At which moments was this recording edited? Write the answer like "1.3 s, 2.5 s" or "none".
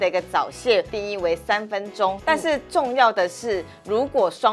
0.9 s, 2.2 s